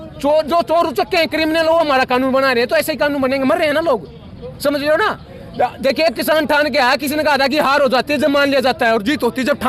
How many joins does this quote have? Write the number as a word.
zero